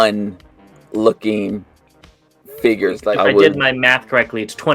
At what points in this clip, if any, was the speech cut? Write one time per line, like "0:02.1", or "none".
0:03.0